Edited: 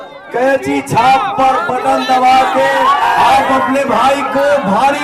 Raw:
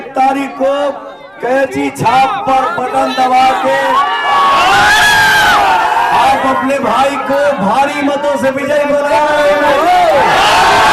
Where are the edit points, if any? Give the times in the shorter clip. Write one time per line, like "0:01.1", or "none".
0:03.0